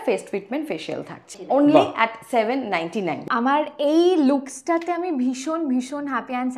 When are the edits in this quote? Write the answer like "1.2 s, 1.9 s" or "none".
1.3 s, 3.2 s